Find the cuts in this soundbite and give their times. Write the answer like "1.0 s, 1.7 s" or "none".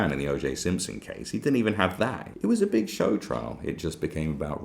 2.2 s

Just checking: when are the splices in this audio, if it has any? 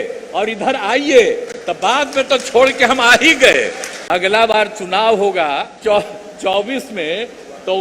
3.9 s, 5.7 s

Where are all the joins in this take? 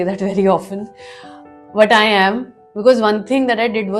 none

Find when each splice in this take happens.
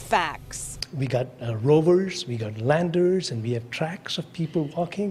none

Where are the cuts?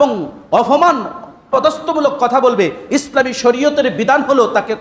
1.5 s

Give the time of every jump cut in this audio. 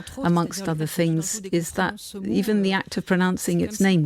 2.2 s

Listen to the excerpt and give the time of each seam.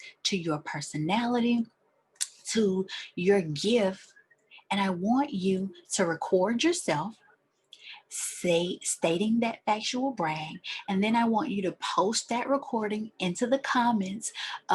none

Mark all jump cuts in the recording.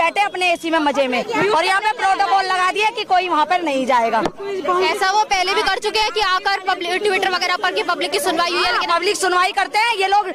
none

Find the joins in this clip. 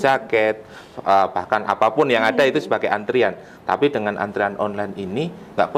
none

